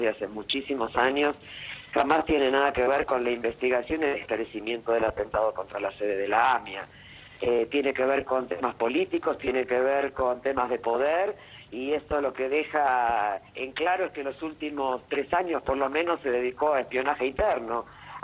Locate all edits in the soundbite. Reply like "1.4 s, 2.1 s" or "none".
none